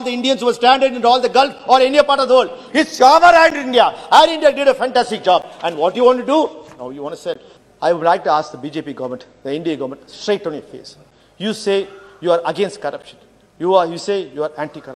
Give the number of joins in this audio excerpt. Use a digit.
1